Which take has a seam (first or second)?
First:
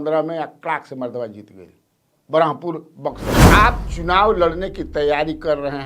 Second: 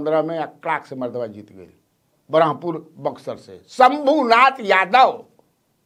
first